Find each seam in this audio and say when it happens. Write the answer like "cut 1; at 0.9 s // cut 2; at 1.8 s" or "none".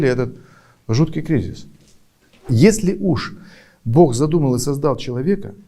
cut 1; at 2.5 s